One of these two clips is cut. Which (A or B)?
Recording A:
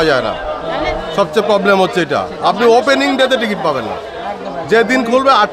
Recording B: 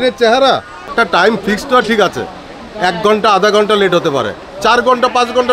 B